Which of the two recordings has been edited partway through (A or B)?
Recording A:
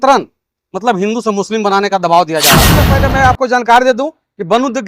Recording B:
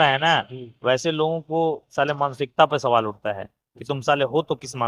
A